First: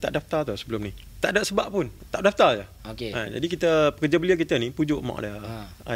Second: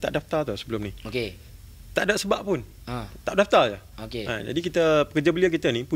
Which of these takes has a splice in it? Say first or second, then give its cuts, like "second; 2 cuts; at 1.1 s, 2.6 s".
first; 2 cuts; at 1.0 s, 2.0 s